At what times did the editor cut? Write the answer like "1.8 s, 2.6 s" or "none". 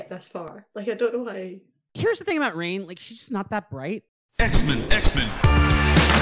4.1 s